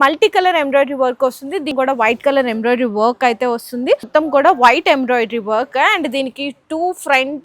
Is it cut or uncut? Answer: cut